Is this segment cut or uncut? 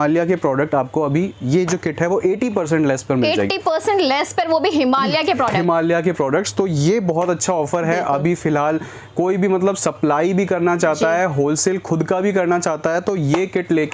uncut